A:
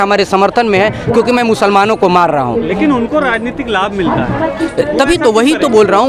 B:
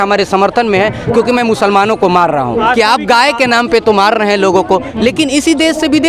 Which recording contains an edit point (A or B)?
B